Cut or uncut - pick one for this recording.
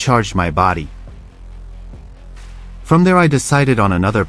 cut